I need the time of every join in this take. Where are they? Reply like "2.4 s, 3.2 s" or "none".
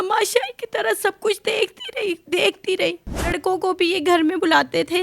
3.3 s